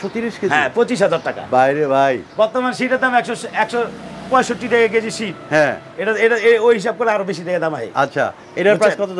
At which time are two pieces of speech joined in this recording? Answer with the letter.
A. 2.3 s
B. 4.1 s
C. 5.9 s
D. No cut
D